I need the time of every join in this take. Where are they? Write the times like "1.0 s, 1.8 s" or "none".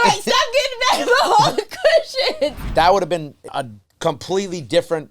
2.7 s, 3.4 s